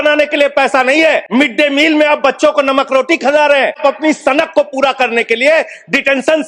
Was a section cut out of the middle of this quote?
yes; 2 cuts; at 1.3 s, 3.8 s

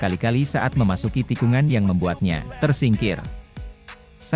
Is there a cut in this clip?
yes; 1 cut; at 2.5 s

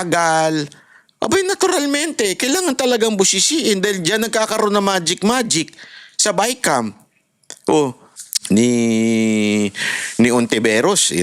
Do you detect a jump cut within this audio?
yes; 1 cut; at 8.1 s

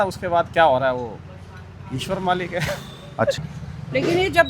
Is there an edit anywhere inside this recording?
yes; 1 cut; at 3.4 s

